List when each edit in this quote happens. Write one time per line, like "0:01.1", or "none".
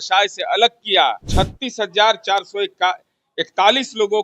0:01.3

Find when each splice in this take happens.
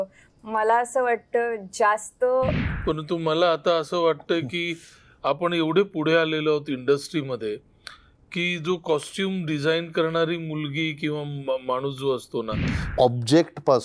0:02.7
0:12.8

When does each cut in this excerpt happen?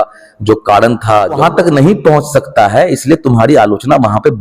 0:01.4

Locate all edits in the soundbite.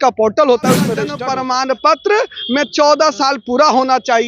0:01.1

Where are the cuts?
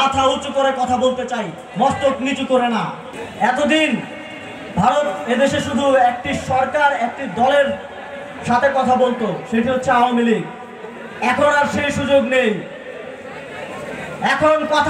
none

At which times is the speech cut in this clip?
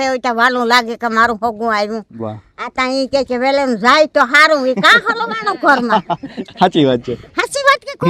none

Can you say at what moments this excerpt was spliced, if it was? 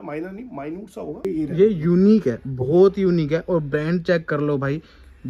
0:01.2

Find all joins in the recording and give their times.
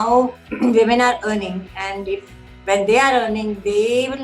none

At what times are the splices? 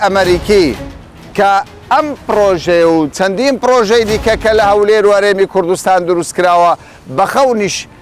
none

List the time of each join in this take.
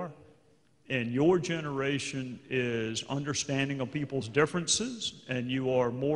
0:03.9

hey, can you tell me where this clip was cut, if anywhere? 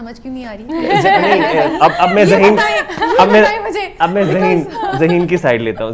none

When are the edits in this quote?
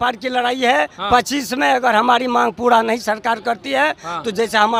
none

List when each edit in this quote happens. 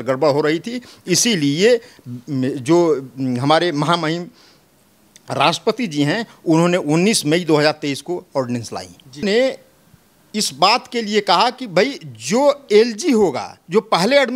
0:09.2

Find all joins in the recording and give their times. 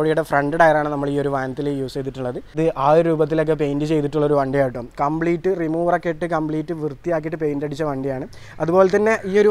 0:02.5

